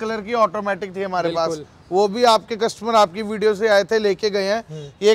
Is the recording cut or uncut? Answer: uncut